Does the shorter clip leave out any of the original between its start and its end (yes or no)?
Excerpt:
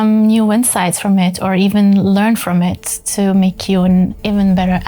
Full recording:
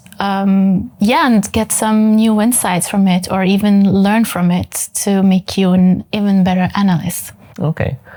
no